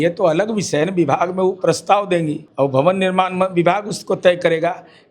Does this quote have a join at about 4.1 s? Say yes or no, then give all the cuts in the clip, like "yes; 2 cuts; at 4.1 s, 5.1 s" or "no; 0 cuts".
no; 1 cut; at 2.4 s